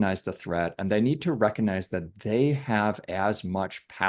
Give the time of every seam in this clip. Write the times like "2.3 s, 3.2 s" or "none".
none